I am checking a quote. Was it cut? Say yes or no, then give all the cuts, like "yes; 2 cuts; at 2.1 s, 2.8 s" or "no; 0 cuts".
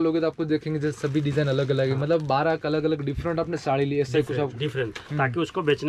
no; 0 cuts